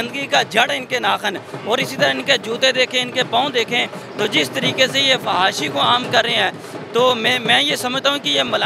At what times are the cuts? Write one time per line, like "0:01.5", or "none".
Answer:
none